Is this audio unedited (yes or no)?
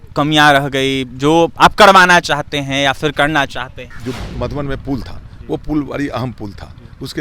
no